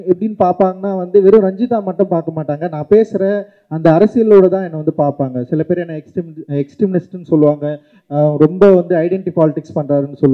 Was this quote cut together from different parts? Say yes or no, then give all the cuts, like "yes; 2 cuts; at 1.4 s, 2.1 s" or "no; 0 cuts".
no; 0 cuts